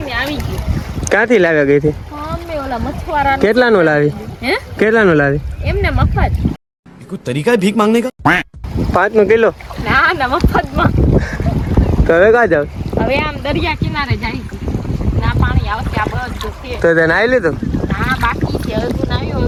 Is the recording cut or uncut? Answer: uncut